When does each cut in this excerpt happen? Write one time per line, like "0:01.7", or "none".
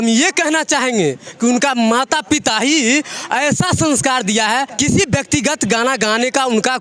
0:04.7